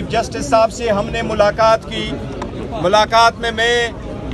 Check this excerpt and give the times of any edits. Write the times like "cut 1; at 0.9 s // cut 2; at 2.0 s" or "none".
none